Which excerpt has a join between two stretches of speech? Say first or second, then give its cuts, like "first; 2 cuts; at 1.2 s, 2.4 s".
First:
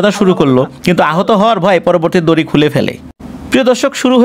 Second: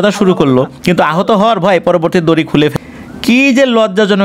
second; 1 cut; at 2.8 s